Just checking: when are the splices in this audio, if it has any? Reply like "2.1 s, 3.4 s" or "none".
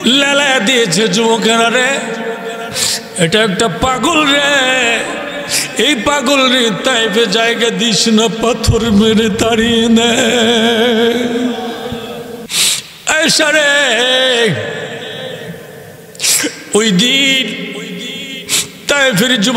12.5 s